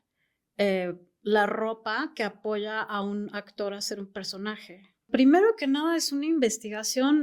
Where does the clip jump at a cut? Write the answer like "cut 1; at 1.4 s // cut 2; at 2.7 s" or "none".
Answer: cut 1; at 5.1 s